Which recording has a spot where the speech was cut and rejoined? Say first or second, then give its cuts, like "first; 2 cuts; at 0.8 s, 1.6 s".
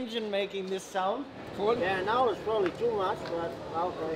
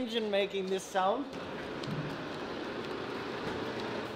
first; 1 cut; at 1.7 s